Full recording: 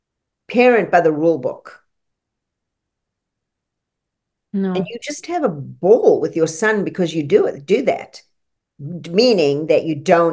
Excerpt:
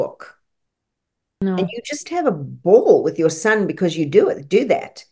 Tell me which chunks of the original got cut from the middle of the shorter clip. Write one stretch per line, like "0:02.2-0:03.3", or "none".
0:02.9-0:04.6